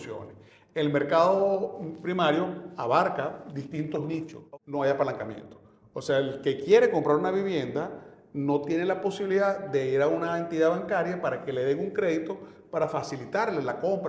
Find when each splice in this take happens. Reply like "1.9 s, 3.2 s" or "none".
4.4 s